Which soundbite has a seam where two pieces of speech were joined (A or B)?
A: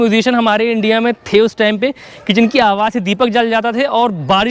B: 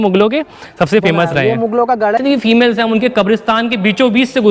B